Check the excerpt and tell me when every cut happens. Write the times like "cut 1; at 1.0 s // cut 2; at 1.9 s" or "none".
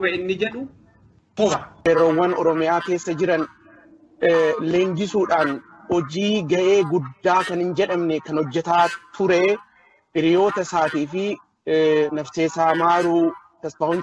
cut 1; at 1.4 s